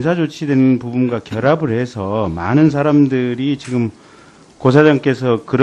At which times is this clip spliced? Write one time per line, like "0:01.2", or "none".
0:03.9